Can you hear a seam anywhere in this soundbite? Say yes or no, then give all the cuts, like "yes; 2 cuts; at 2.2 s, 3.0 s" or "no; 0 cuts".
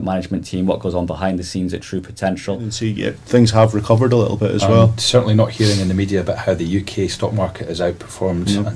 yes; 1 cut; at 2.9 s